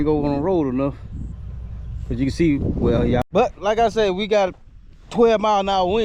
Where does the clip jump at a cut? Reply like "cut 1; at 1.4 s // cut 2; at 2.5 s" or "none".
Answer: cut 1; at 3.2 s